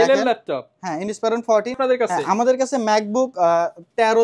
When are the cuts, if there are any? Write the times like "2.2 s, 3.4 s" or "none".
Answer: 1.8 s

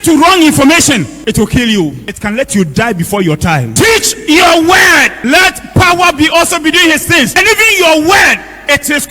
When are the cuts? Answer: 1.1 s, 2.1 s, 3.7 s, 5.2 s, 7.3 s

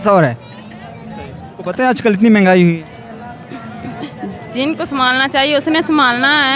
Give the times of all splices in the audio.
1.6 s

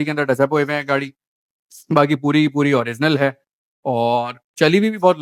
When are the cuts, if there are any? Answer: none

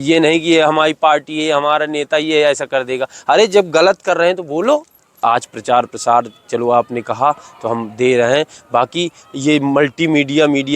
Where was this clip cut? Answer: 5.0 s

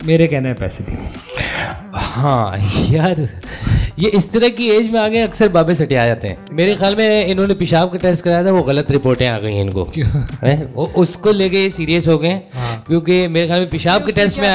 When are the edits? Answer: 6.4 s

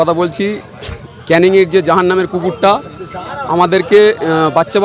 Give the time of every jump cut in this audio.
none

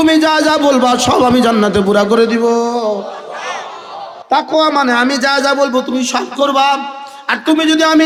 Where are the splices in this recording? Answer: none

